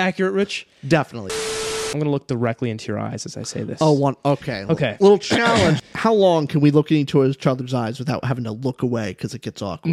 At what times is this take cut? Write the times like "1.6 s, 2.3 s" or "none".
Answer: 1.4 s, 5.8 s